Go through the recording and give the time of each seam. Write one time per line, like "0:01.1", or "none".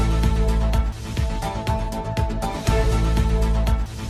none